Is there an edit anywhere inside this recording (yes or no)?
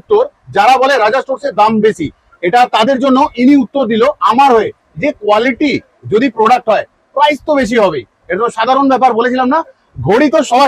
no